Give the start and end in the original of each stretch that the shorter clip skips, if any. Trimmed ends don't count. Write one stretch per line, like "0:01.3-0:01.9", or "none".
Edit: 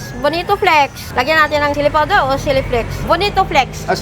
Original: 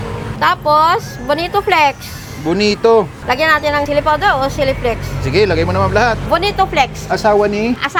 0:02.1-0:03.2
0:05.1-0:06.2